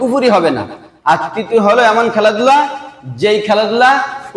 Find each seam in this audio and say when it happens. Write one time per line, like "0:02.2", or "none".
none